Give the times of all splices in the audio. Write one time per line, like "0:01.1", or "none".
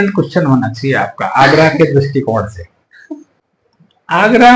none